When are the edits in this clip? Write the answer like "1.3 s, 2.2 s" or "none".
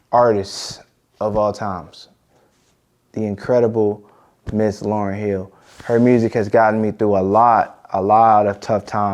none